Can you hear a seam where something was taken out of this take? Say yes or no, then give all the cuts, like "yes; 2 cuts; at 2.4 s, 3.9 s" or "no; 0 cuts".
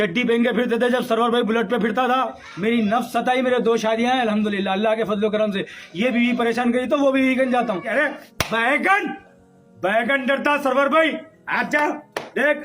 yes; 2 cuts; at 2.5 s, 7.9 s